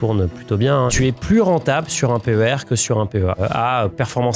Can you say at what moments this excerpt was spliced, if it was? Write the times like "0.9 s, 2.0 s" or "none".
0.9 s, 3.4 s